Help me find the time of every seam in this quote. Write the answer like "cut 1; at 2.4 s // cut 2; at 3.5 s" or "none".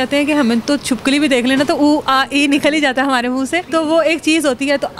cut 1; at 3.6 s